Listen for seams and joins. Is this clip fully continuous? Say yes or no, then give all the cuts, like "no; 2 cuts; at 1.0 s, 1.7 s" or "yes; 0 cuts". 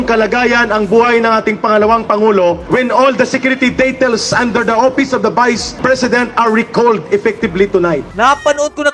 no; 3 cuts; at 2.6 s, 5.7 s, 8.1 s